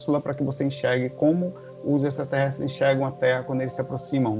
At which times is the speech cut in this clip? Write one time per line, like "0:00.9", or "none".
none